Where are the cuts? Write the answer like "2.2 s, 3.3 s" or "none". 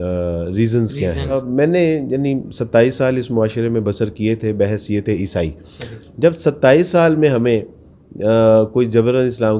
1.4 s